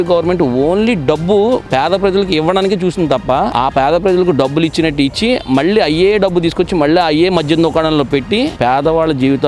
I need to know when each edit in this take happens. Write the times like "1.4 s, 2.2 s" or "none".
8.5 s

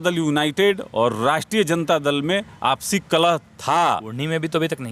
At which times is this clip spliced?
none

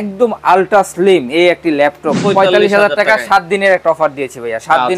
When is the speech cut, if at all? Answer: 2.2 s

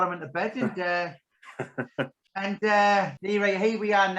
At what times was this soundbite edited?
2.2 s, 3.2 s

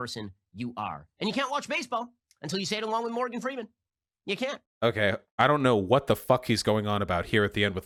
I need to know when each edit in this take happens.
none

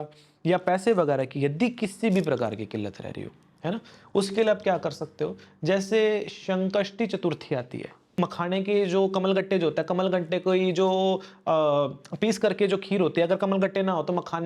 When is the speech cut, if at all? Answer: 8.1 s

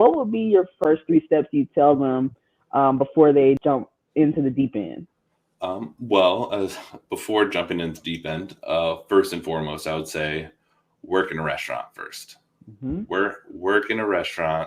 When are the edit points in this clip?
0.8 s, 3.6 s

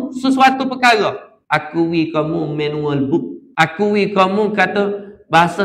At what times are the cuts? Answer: 1.3 s, 3.4 s

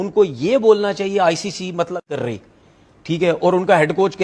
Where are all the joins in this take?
2.1 s

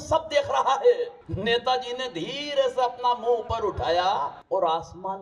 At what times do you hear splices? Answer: 1.2 s, 4.4 s

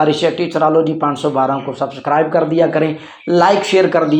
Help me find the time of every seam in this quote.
none

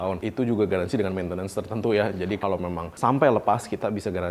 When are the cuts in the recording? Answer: 2.4 s

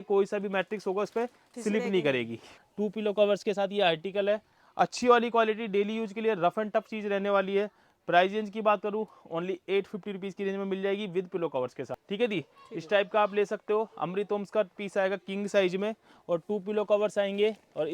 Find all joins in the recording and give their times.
2.6 s, 12.0 s

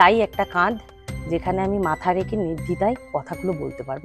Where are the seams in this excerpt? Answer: none

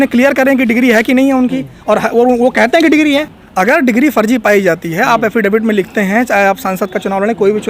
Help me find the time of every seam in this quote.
3.4 s

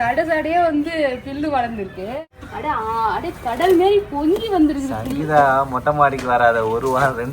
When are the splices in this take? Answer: 2.4 s

